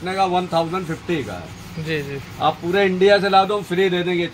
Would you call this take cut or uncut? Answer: uncut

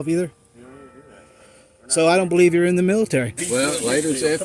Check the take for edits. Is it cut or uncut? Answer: cut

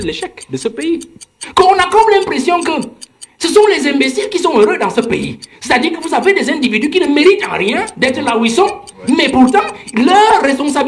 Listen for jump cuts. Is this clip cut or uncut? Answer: cut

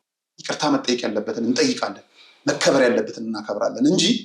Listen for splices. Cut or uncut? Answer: uncut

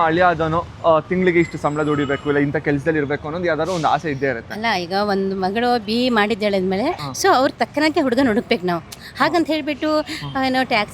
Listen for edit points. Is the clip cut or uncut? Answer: cut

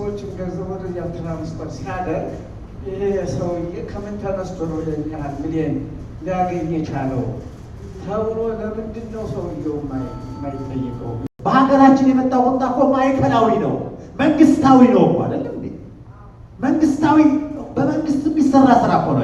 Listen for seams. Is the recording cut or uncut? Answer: cut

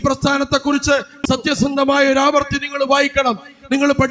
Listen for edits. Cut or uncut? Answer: cut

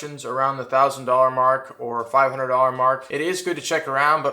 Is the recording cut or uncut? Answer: cut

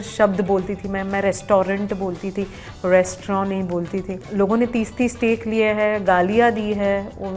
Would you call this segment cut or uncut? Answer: uncut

